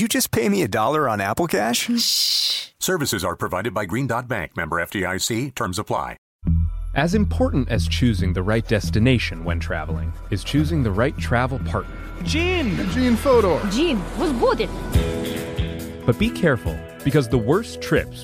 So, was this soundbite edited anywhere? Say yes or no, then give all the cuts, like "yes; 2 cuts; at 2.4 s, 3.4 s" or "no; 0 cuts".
yes; 1 cut; at 6.3 s